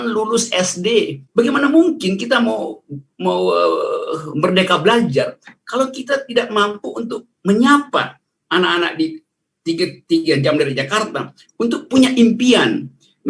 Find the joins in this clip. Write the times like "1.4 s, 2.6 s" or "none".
1.2 s